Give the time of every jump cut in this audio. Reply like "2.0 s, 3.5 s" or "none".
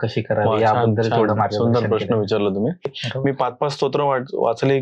3.0 s